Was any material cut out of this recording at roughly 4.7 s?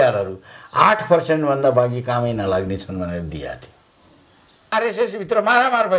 yes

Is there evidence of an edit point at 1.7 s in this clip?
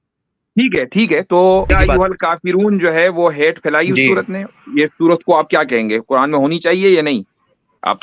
yes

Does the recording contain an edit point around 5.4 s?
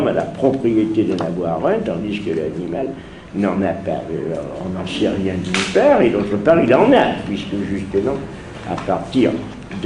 yes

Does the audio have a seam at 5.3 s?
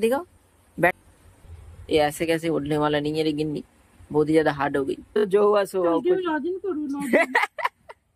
yes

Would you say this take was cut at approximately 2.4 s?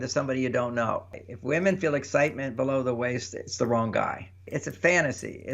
no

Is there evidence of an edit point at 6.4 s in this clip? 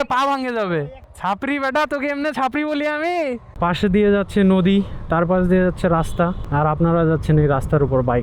yes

